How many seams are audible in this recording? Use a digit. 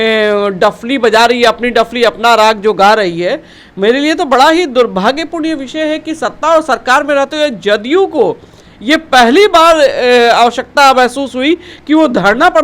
0